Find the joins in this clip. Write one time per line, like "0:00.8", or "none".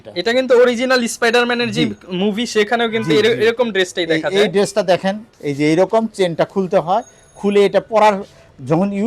none